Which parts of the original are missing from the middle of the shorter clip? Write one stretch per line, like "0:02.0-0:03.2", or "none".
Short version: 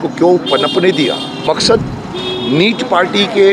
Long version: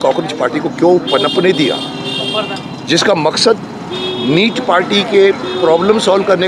0:02.1-0:03.2